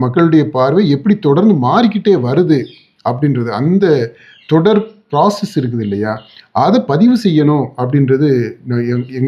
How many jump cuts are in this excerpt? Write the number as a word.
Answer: zero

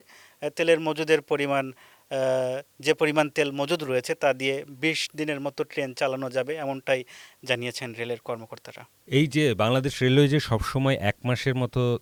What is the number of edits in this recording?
zero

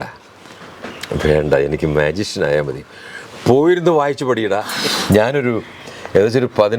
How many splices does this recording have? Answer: one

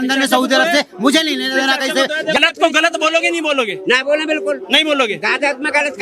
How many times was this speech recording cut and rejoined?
one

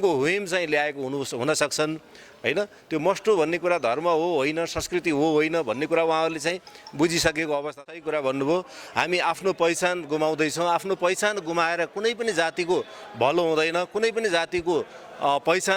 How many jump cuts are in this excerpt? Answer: one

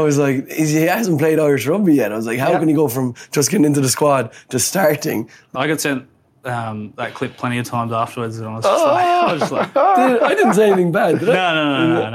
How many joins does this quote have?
one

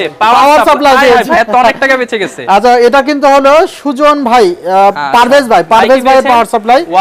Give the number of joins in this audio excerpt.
zero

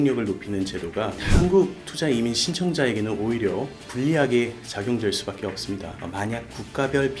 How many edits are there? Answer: two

